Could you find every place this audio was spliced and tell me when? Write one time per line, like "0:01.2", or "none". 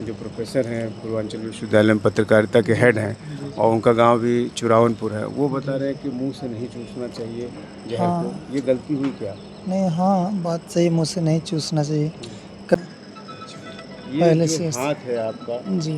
0:12.8